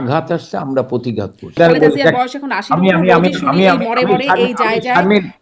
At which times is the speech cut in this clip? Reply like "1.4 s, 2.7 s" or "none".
1.5 s